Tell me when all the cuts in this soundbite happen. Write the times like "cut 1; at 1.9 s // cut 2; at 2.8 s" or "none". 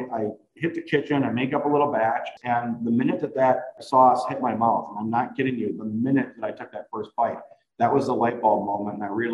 cut 1; at 2.3 s // cut 2; at 3.8 s